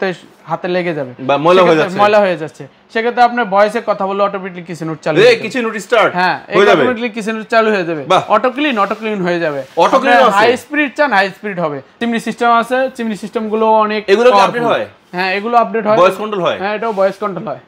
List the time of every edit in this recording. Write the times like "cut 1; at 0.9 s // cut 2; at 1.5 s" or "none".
cut 1; at 12.0 s